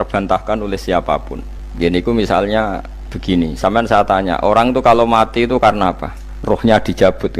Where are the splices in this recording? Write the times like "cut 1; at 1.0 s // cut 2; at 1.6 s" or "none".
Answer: none